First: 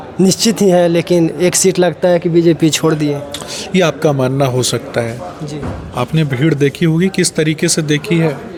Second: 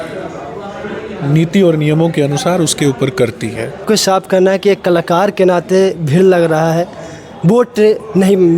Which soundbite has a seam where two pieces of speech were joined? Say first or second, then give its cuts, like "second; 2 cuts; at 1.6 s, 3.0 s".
second; 1 cut; at 3.8 s